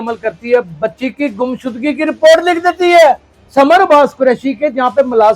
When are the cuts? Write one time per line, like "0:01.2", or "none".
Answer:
0:03.3